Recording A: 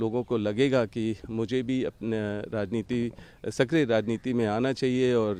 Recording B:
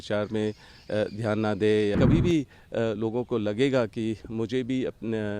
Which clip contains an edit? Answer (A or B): B